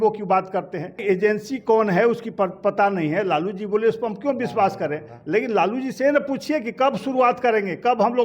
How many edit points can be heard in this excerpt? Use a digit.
1